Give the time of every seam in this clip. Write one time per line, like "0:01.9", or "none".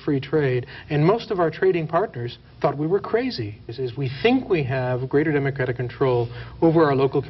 0:03.9